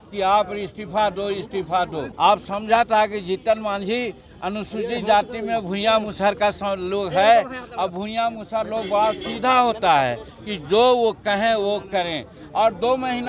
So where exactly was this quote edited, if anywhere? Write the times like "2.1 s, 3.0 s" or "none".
2.0 s, 10.4 s